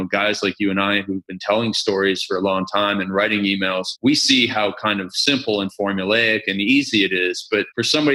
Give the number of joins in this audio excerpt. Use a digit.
0